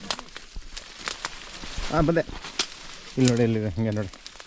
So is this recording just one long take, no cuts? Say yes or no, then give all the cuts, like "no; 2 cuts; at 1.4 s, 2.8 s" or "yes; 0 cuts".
yes; 0 cuts